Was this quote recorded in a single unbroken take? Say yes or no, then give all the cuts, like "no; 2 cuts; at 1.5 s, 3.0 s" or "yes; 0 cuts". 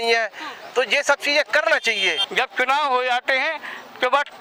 no; 1 cut; at 2.2 s